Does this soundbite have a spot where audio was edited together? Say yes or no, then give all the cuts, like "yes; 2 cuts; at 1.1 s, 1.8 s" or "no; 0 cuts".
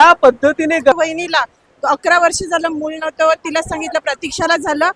yes; 1 cut; at 0.9 s